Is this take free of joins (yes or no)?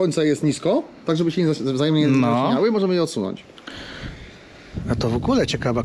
yes